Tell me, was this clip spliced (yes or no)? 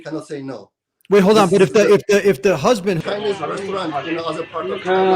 yes